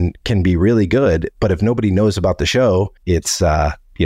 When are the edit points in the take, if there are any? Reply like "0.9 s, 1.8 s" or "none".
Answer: 3.0 s